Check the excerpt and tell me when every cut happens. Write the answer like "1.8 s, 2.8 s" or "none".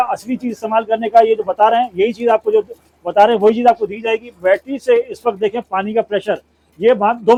none